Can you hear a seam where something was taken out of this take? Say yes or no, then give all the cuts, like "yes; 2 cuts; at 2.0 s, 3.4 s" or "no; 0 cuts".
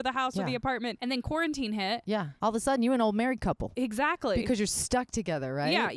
yes; 3 cuts; at 1.0 s, 2.3 s, 3.7 s